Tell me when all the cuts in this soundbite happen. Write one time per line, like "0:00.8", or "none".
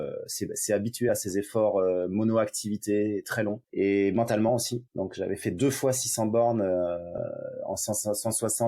0:03.6
0:04.8